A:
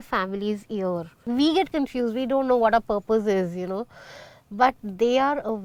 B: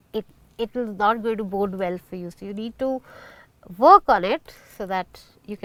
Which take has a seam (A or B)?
A